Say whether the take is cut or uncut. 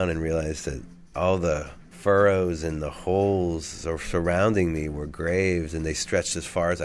uncut